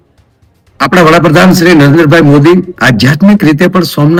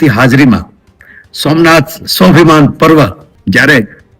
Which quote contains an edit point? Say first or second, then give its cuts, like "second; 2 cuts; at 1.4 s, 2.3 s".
second; 1 cut; at 3.3 s